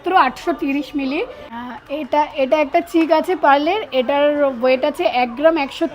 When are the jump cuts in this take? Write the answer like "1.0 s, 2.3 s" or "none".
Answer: 1.4 s